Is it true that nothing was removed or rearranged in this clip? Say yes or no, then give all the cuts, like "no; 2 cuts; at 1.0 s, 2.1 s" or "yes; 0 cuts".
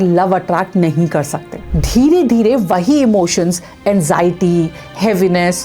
no; 1 cut; at 1.6 s